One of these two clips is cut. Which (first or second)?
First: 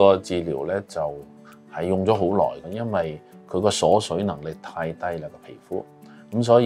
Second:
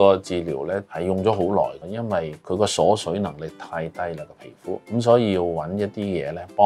second